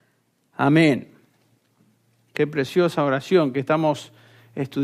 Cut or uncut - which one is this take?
cut